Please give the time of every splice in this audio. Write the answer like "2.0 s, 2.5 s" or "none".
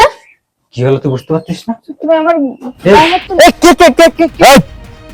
3.2 s